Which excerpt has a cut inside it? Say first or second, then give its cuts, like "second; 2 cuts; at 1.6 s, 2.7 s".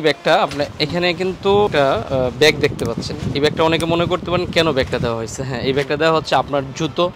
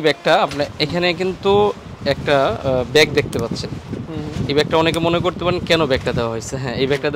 first; 2 cuts; at 1.7 s, 3.1 s